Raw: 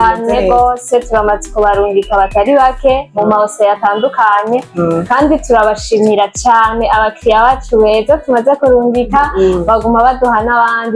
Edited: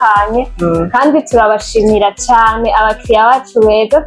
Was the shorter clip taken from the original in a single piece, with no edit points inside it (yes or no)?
yes